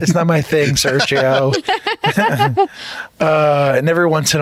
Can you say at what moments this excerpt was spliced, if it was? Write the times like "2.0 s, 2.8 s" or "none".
none